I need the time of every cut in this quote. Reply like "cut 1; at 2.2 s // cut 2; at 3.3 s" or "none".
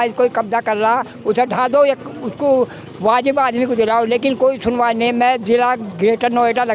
none